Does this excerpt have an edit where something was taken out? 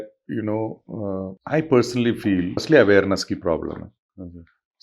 yes; 2 cuts; at 1.4 s, 2.6 s

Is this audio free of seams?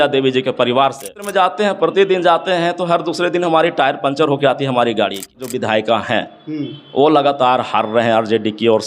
no; 2 cuts; at 1.2 s, 5.4 s

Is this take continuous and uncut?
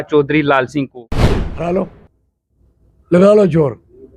no; 1 cut; at 1.0 s

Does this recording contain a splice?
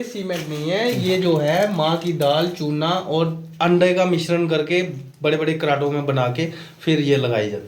no; 0 cuts

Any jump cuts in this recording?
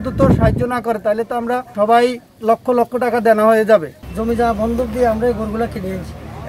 yes; 3 cuts; at 1.7 s, 2.3 s, 4.0 s

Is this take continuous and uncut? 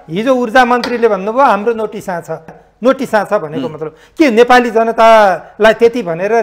no; 1 cut; at 2.5 s

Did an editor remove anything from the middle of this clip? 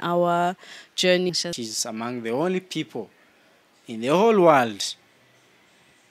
yes; 1 cut; at 1.3 s

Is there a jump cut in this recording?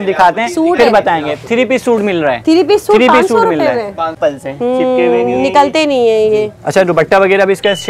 yes; 1 cut; at 4.1 s

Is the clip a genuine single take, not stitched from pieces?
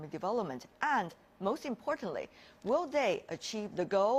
no; 1 cut; at 1.2 s

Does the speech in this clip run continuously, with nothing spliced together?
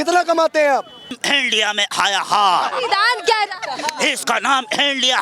no; 1 cut; at 1.2 s

